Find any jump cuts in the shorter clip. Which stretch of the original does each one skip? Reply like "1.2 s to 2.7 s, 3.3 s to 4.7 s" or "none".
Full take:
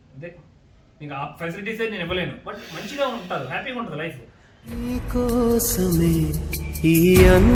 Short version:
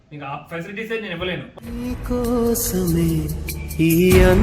2.4 s to 4.6 s